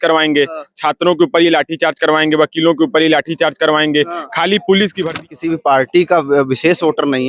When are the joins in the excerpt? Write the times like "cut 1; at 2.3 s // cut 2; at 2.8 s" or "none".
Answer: cut 1; at 5.2 s